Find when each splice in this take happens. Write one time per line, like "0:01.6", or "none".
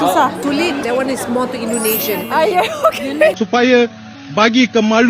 0:03.4